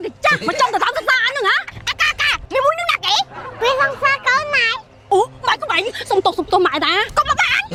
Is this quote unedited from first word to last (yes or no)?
yes